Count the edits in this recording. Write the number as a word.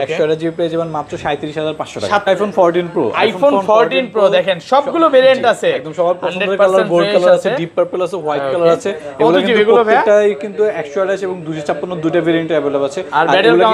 one